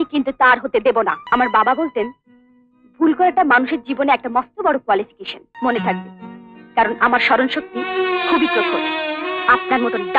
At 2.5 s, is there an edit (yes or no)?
no